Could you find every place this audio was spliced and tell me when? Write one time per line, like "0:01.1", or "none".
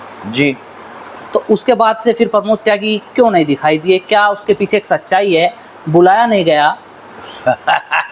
none